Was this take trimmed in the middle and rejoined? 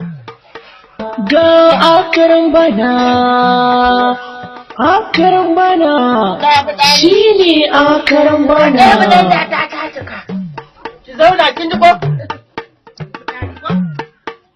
yes; 1 cut; at 3.4 s

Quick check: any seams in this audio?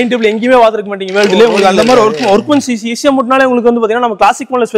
no; 0 cuts

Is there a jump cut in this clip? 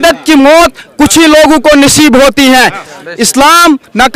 no; 0 cuts

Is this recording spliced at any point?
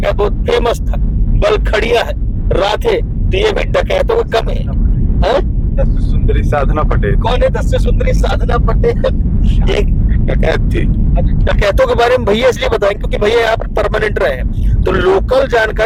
no; 0 cuts

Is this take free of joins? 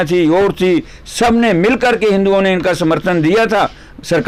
yes; 0 cuts

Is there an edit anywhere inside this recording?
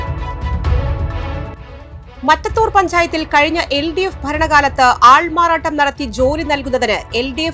yes; 1 cut; at 1.6 s

